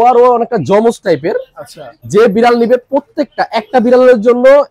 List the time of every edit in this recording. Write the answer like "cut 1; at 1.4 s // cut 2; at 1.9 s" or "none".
cut 1; at 1.9 s